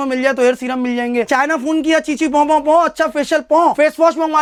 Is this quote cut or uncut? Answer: uncut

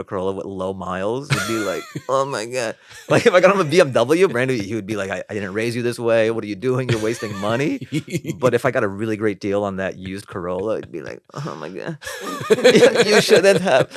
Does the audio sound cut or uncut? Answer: uncut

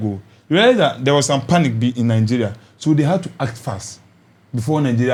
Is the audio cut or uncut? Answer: uncut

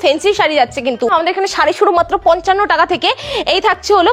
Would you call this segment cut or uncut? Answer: cut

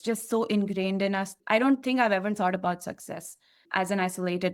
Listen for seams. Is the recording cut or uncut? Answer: cut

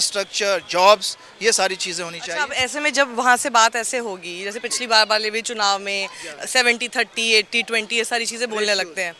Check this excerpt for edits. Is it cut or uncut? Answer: uncut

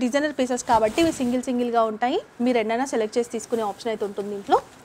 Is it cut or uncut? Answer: uncut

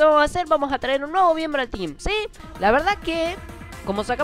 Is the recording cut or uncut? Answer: cut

